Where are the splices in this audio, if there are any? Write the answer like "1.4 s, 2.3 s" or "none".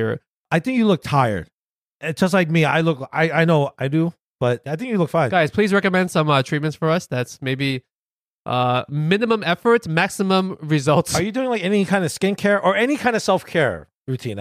none